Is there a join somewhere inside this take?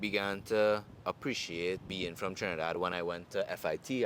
yes; 1 cut; at 1.9 s

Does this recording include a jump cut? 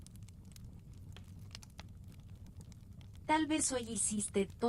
no; 0 cuts

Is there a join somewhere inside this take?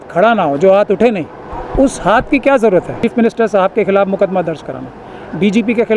yes; 1 cut; at 2.9 s

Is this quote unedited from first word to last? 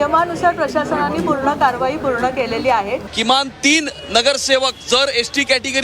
no; 1 cut; at 3.1 s

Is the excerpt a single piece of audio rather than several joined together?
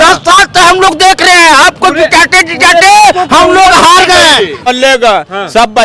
no; 1 cut; at 4.7 s

